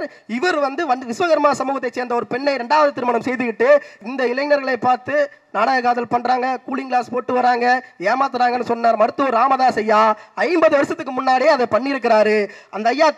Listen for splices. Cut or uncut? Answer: cut